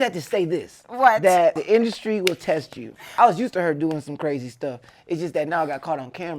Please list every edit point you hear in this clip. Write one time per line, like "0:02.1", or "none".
0:01.6
0:03.1